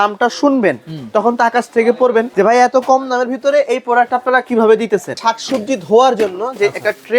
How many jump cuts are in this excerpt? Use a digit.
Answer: 2